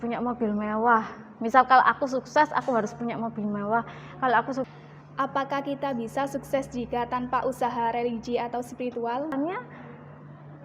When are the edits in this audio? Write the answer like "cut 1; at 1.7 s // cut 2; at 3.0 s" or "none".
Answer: cut 1; at 4.7 s // cut 2; at 9.3 s